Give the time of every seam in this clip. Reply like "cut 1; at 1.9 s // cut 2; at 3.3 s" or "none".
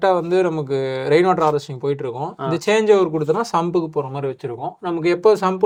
none